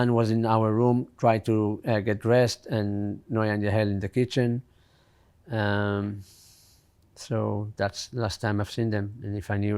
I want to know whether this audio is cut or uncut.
uncut